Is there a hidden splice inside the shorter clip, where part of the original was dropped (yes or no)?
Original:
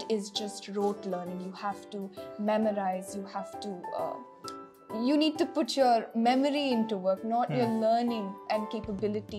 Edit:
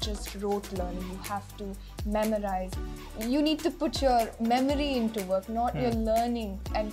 yes